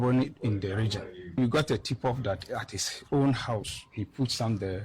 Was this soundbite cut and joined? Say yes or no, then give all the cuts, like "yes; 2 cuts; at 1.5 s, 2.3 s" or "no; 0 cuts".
yes; 2 cuts; at 1.4 s, 3.8 s